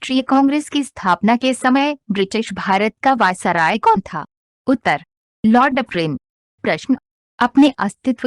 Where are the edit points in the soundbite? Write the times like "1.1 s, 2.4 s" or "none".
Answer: 1.2 s